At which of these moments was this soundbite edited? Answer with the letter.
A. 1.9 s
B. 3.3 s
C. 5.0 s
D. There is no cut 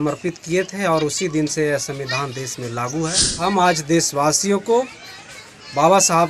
B